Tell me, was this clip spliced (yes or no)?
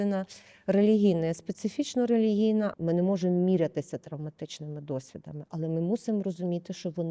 yes